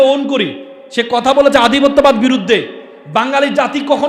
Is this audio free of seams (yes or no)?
yes